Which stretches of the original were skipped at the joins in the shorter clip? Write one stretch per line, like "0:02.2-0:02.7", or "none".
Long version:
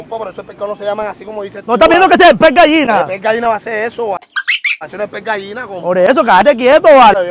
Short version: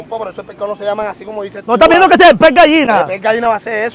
none